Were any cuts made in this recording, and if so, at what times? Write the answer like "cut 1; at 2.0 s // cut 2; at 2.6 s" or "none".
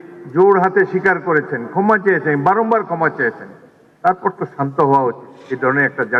none